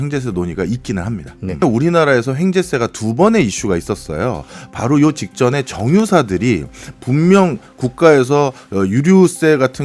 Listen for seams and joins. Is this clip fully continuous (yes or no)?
no